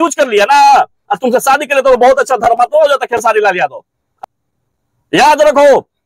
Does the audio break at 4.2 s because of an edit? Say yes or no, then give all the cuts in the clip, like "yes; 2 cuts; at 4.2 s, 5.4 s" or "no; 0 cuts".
yes; 1 cut; at 4.2 s